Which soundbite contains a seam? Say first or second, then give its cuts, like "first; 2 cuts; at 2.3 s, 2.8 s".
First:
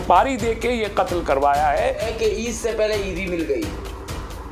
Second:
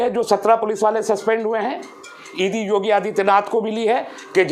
first; 1 cut; at 2.1 s